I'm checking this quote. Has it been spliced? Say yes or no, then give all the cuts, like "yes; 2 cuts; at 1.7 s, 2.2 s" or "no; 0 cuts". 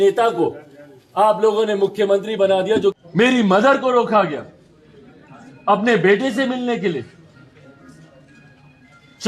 yes; 1 cut; at 3.0 s